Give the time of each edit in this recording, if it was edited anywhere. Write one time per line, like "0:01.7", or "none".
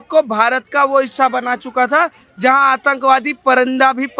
none